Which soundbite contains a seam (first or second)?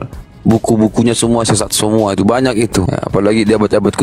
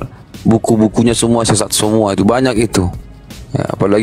first